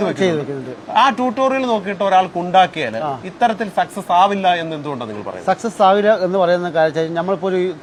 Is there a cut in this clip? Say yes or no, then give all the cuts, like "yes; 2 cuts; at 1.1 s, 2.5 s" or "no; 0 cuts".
no; 0 cuts